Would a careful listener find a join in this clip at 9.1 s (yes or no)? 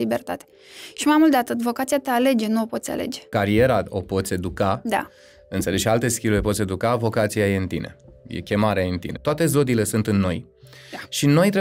yes